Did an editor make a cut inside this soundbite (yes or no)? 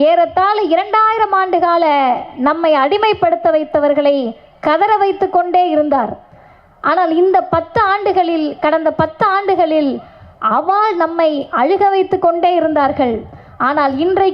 no